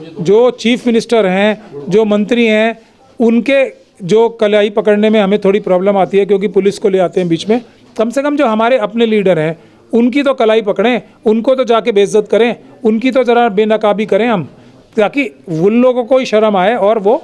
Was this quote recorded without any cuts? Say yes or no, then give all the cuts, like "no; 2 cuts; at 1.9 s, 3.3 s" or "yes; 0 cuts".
yes; 0 cuts